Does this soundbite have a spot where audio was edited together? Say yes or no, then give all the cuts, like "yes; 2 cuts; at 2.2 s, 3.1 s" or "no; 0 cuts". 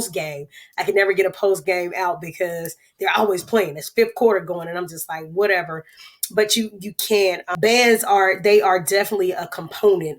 yes; 1 cut; at 7.5 s